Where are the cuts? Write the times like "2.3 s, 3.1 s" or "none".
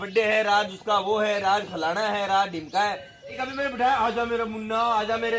3.3 s